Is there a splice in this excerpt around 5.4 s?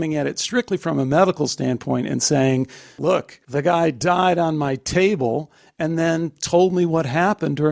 no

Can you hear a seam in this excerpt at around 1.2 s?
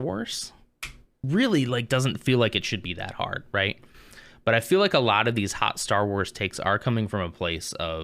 yes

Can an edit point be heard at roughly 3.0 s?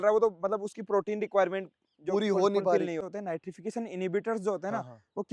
yes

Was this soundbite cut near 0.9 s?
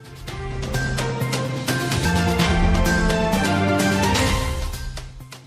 yes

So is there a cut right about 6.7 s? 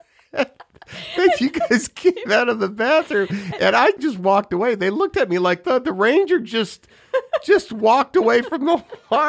no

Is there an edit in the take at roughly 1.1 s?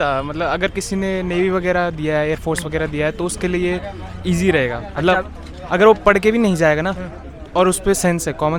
no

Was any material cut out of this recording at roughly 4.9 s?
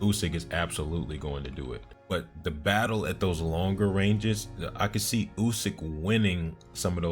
no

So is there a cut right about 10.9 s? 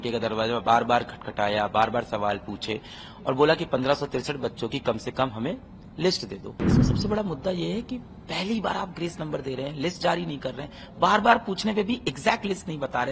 no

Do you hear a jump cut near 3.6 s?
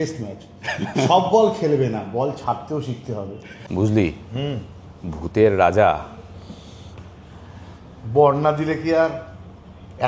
yes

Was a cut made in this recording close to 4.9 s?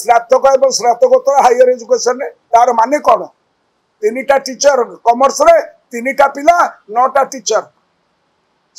no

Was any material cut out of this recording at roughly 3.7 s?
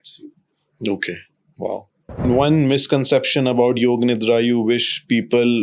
no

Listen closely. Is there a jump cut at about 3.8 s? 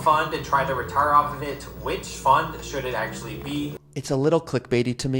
yes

